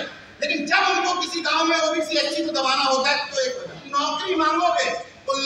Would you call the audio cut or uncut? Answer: cut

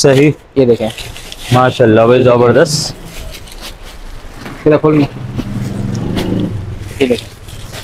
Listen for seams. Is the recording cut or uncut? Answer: uncut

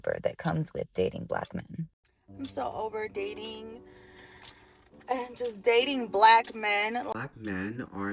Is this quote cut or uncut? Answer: cut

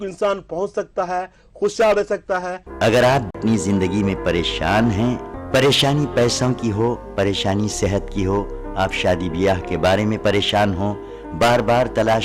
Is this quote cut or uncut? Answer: cut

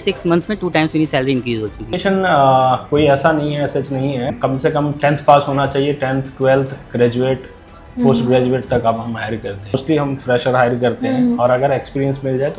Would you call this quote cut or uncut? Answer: cut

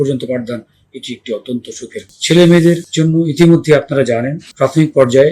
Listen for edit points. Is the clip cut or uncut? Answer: cut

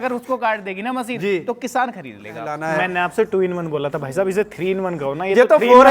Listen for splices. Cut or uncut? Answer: cut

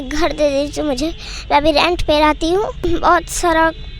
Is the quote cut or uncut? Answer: cut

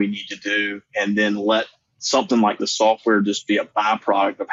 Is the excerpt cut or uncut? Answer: uncut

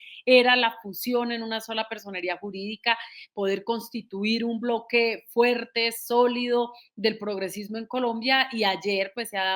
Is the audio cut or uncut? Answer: uncut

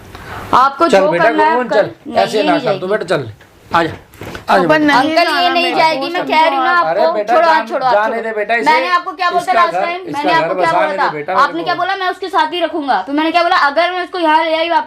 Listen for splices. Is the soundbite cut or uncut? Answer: uncut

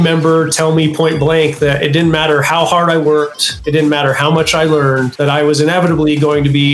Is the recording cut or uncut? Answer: cut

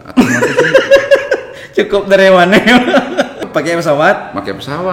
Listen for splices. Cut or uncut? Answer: cut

